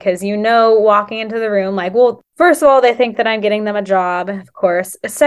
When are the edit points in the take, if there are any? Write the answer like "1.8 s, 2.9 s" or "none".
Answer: 2.2 s